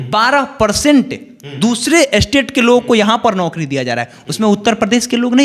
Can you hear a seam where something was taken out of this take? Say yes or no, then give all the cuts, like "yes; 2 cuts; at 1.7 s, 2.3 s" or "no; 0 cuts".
no; 0 cuts